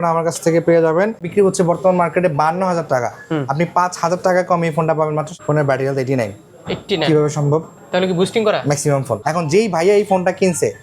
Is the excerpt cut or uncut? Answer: cut